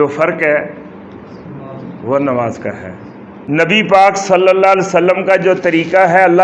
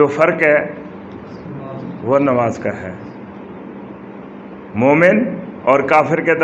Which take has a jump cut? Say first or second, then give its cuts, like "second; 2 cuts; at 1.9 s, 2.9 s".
first; 1 cut; at 3.4 s